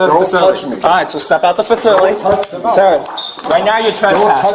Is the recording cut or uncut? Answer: uncut